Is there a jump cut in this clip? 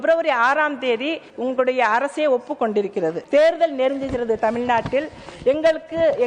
yes; 2 cuts; at 1.2 s, 3.2 s

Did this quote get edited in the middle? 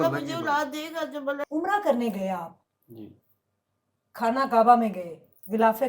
yes; 1 cut; at 1.4 s

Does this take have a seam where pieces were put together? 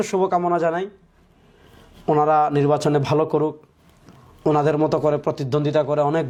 no; 0 cuts

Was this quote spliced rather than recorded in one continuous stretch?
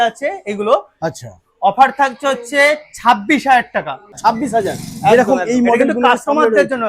yes; 1 cut; at 4.2 s

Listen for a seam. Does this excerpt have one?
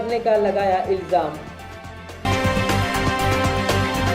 no; 0 cuts

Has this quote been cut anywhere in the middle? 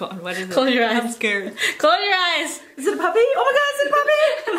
yes; 1 cut; at 2.7 s

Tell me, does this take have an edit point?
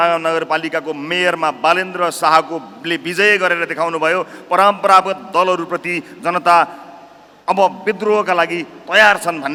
no; 0 cuts

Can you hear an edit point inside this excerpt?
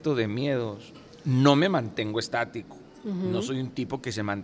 no; 0 cuts

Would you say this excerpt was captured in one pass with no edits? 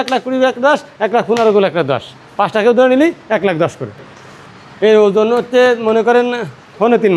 yes; 0 cuts

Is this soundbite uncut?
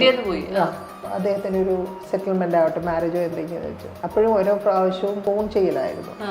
no; 3 cuts; at 1.0 s, 3.9 s, 5.2 s

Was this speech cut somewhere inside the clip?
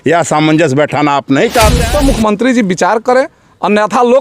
yes; 1 cut; at 1.8 s

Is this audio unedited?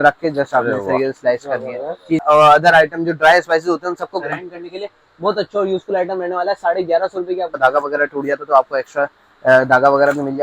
no; 2 cuts; at 2.2 s, 7.6 s

